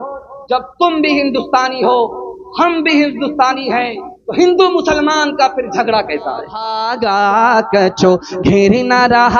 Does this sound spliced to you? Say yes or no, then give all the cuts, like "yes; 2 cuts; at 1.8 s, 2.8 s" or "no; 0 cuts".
yes; 1 cut; at 6.6 s